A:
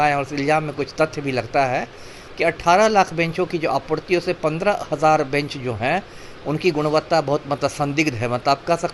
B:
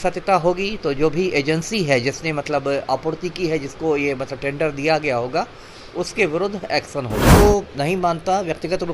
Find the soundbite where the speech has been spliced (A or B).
B